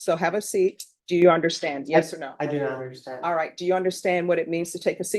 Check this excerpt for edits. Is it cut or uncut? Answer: cut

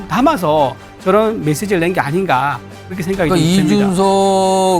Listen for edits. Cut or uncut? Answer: uncut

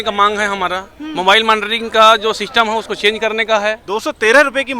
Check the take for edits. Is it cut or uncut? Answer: cut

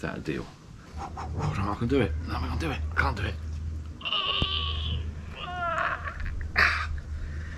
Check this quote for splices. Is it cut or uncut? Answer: cut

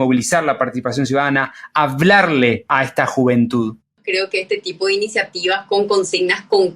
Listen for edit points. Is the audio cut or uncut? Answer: cut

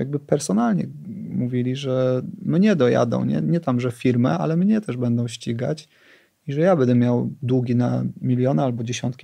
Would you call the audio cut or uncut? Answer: uncut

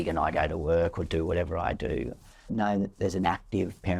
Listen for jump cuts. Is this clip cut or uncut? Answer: cut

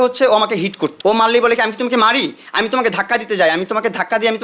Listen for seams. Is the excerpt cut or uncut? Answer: cut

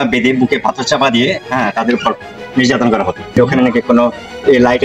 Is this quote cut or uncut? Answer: cut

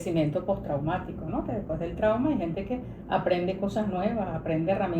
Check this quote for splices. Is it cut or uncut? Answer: uncut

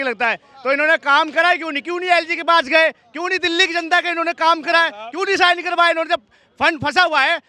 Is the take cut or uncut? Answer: uncut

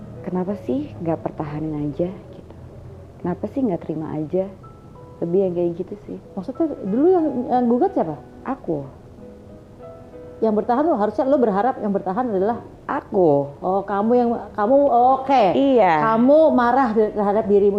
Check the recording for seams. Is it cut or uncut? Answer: uncut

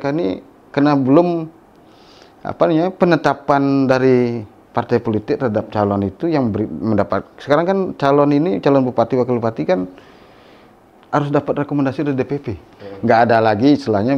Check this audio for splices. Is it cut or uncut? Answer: cut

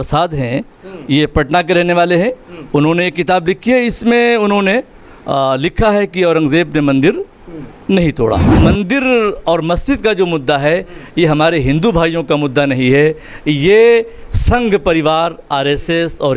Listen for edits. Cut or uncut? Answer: cut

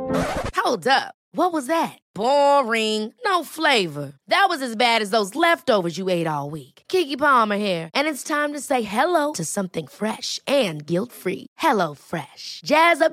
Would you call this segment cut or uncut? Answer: uncut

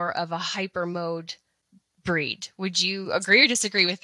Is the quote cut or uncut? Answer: uncut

